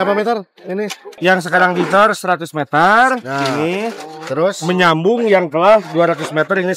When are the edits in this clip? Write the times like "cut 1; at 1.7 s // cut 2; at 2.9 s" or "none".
cut 1; at 1.1 s